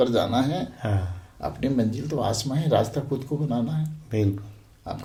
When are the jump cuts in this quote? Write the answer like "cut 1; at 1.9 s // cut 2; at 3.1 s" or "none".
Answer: none

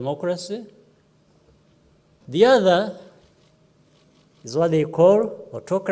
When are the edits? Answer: cut 1; at 2.2 s

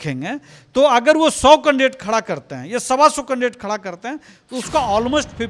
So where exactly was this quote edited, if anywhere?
none

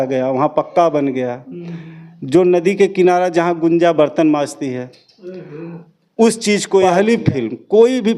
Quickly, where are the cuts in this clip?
cut 1; at 6.9 s

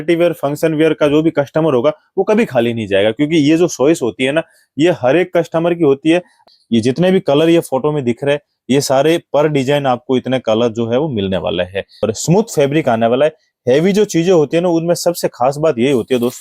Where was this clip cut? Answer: cut 1; at 6.3 s // cut 2; at 12.0 s

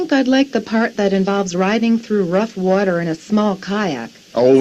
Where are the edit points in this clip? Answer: none

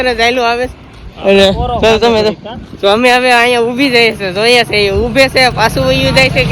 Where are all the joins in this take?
none

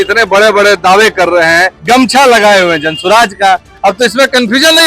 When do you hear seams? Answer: cut 1; at 1.7 s

